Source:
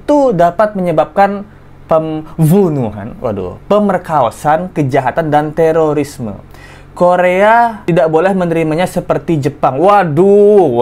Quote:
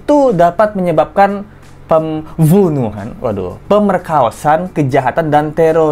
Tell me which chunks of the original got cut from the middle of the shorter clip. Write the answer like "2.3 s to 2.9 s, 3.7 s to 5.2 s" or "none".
none